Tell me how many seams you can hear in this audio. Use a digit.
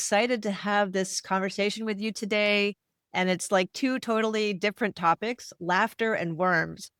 0